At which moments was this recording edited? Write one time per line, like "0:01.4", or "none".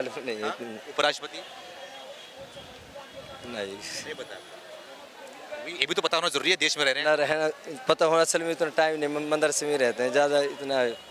none

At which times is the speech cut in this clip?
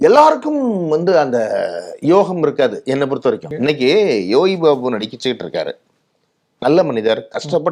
0:03.5

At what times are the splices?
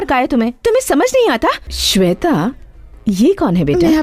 0:01.7

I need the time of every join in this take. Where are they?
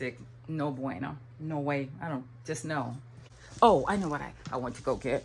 0:03.4

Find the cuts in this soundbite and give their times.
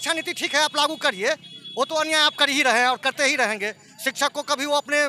none

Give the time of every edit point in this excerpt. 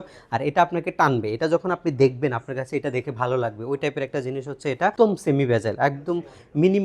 0:04.9

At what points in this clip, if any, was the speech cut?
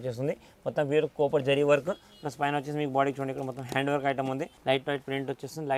0:04.5

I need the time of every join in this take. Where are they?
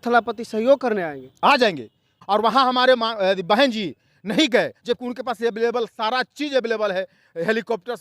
0:02.1

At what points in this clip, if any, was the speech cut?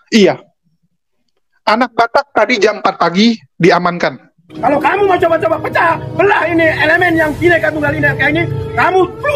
0:04.4

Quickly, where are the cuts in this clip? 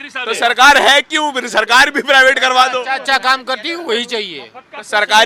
none

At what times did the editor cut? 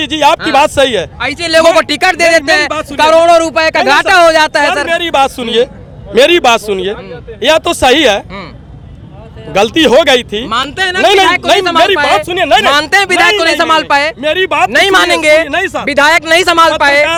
none

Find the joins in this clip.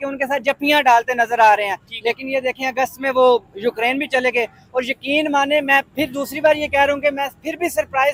none

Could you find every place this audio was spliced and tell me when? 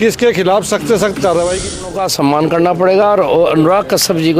0:01.8

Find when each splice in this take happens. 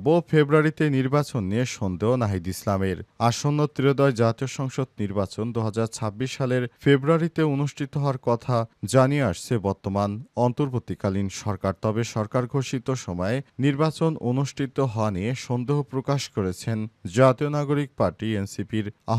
none

